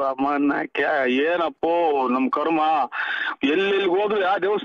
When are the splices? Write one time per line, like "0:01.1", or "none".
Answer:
none

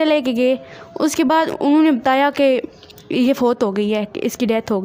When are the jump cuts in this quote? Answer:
none

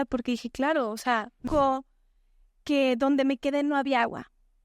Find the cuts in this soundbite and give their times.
0:01.4

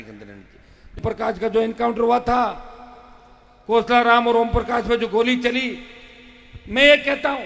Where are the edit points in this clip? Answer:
0:01.0

